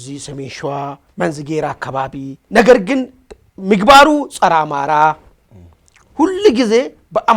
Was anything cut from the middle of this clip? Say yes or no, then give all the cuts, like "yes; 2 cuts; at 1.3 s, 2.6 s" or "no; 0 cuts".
yes; 2 cuts; at 1.0 s, 2.4 s